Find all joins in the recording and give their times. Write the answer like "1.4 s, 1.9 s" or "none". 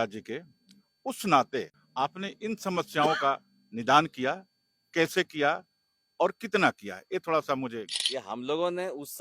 1.8 s, 7.9 s